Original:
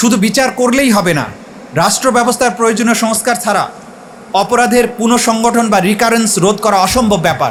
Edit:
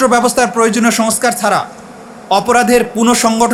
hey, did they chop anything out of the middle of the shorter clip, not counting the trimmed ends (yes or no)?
no